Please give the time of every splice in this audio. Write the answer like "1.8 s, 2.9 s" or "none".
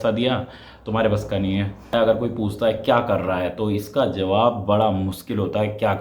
1.9 s